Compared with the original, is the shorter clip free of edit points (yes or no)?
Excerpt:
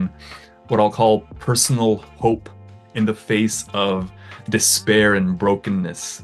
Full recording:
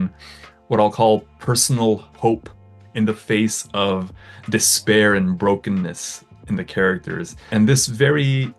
yes